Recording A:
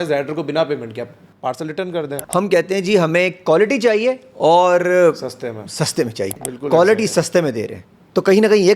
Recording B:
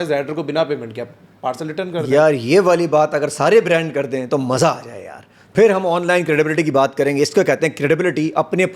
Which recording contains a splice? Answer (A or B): A